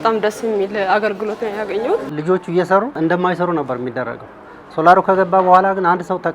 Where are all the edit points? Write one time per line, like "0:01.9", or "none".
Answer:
0:02.1
0:02.9